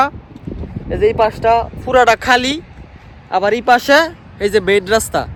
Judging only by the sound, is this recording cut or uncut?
uncut